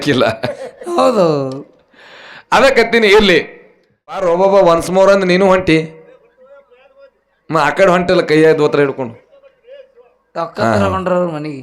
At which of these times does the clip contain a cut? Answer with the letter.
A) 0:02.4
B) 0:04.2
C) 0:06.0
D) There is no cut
B